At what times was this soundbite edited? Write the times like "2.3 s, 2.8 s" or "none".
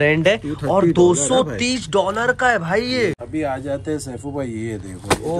3.2 s